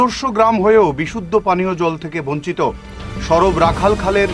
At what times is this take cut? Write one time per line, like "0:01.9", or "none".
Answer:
none